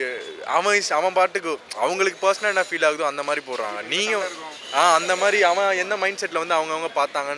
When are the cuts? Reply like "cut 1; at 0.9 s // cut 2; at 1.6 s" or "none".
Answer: none